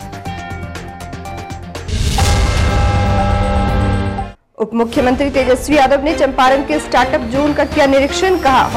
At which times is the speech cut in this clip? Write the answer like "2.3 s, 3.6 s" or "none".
none